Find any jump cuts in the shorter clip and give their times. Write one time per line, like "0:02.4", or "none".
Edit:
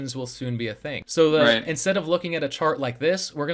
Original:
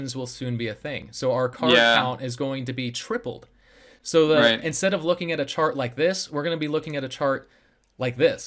0:01.0